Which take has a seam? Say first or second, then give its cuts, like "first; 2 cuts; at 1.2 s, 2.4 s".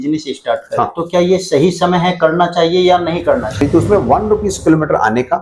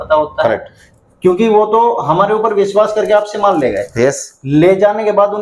first; 1 cut; at 3.6 s